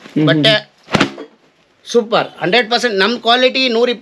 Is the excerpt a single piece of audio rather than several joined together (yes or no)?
yes